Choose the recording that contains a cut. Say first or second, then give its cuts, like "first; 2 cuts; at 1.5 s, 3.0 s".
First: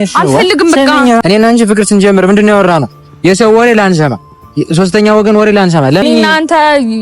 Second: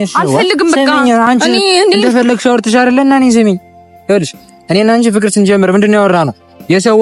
first; 2 cuts; at 1.2 s, 6.0 s